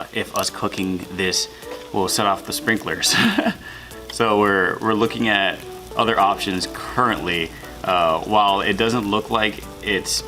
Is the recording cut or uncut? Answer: uncut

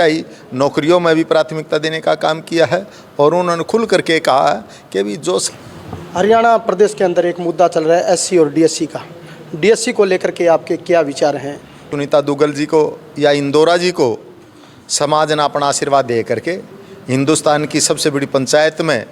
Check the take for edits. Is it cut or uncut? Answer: cut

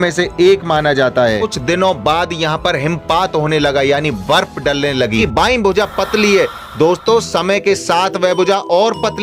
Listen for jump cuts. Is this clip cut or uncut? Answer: cut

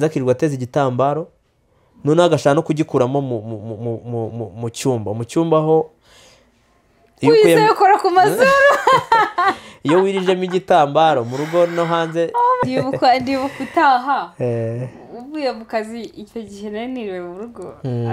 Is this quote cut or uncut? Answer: cut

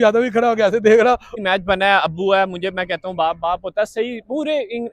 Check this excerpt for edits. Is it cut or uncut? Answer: cut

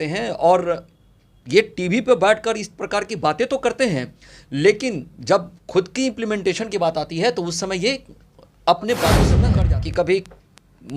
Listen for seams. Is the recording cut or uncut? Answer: cut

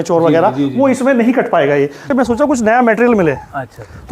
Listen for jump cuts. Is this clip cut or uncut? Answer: cut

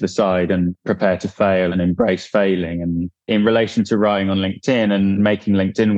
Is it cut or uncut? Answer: cut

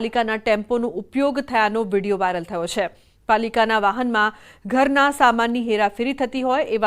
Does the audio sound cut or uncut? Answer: cut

